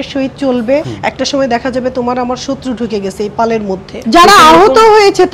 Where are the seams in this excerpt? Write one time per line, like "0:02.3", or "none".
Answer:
0:00.9
0:03.9